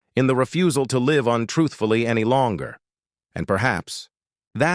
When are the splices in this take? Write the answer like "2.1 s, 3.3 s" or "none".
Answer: none